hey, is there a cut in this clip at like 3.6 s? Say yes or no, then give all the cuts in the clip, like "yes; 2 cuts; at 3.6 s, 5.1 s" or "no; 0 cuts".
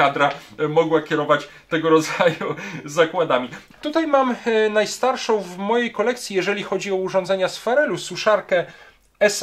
yes; 1 cut; at 3.6 s